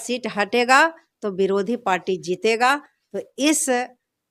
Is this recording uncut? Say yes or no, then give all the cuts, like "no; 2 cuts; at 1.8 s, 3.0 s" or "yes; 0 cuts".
yes; 0 cuts